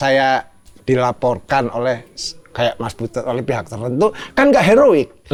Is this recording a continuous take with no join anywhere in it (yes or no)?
yes